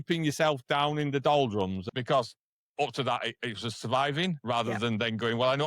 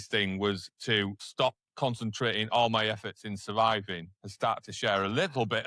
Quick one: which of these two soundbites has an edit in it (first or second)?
first